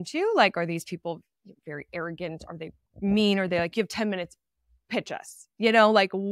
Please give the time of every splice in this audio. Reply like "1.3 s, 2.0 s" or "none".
none